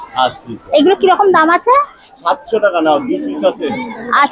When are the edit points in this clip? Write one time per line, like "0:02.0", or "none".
none